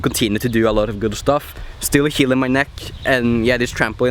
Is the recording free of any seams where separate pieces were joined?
yes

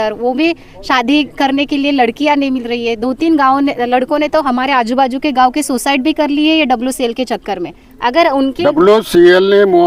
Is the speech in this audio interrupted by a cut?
no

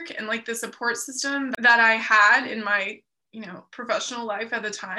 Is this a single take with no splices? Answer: no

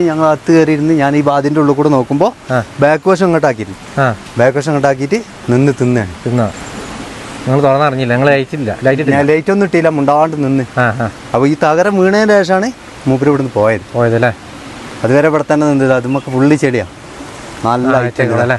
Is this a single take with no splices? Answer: yes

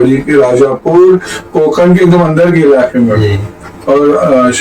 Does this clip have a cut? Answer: no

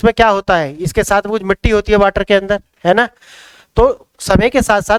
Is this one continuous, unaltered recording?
yes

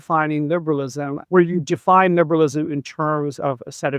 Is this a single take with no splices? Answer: no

